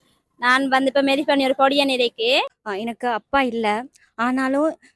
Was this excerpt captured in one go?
no; 1 cut; at 2.6 s

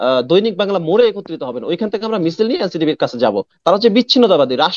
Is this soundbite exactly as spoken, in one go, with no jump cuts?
no; 1 cut; at 3.5 s

